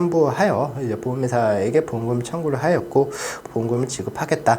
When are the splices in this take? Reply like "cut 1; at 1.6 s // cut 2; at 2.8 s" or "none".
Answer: cut 1; at 3.4 s